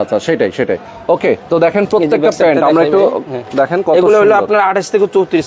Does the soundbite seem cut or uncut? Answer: uncut